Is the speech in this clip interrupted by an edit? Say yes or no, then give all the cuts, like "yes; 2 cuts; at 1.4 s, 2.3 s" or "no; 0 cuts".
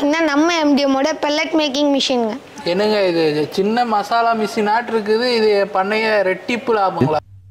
no; 0 cuts